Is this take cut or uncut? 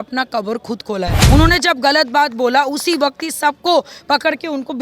cut